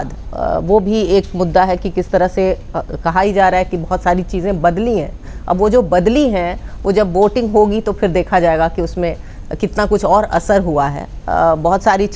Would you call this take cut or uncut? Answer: uncut